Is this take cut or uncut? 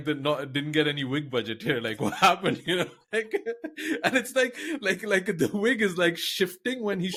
uncut